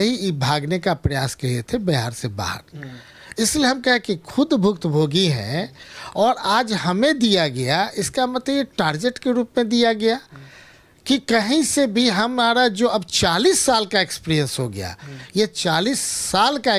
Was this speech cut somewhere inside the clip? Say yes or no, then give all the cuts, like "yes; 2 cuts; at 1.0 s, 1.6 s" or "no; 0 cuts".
no; 0 cuts